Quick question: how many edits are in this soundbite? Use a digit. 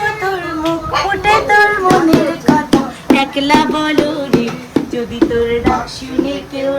0